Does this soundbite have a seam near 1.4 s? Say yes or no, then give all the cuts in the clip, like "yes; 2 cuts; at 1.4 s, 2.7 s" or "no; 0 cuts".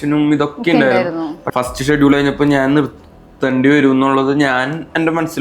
yes; 1 cut; at 1.4 s